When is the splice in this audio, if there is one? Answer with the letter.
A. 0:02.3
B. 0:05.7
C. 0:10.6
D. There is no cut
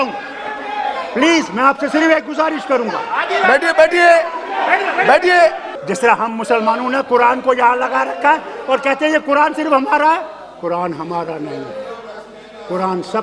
B